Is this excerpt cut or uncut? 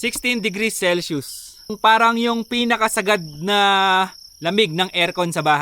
cut